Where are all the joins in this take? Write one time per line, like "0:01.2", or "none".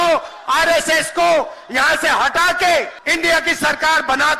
0:03.0